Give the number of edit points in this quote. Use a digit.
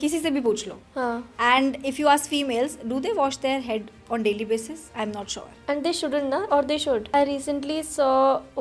1